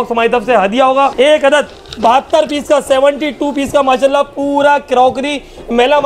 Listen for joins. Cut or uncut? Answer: cut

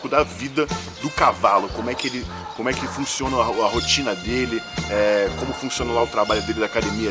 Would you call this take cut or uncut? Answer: uncut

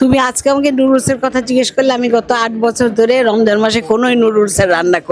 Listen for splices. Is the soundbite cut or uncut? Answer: uncut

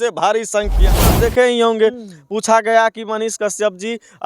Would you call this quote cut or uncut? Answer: cut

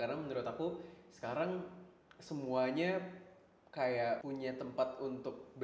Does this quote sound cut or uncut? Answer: cut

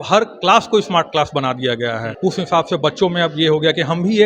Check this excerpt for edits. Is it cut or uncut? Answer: cut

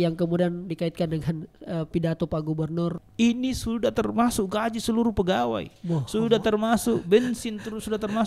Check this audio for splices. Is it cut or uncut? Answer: cut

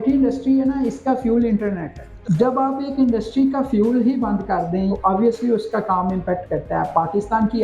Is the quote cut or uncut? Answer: cut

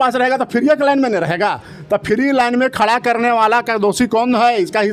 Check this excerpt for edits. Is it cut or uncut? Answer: uncut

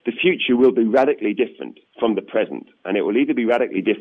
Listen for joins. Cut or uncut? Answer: uncut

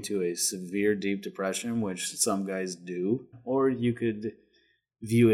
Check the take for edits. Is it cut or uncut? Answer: cut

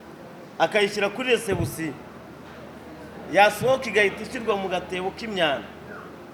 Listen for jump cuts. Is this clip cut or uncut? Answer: uncut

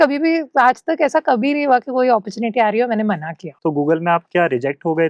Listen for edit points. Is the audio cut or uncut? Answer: cut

